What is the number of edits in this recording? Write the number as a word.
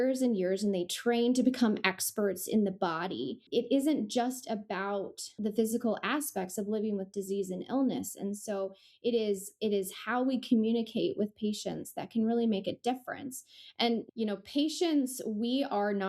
three